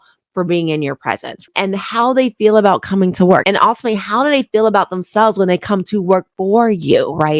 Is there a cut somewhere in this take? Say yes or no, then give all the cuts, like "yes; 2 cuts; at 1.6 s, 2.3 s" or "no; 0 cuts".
yes; 2 cuts; at 1.3 s, 3.4 s